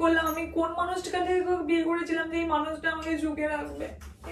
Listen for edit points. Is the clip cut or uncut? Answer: uncut